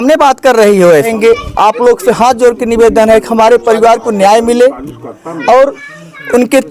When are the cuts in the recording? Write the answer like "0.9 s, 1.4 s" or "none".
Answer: 1.1 s